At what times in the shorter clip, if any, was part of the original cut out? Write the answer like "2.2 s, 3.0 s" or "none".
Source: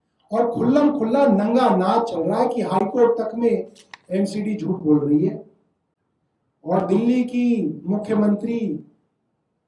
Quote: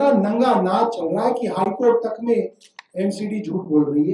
none